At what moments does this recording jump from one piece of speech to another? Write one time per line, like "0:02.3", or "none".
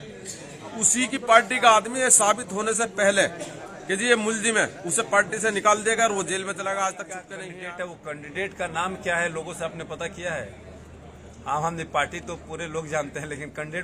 0:07.4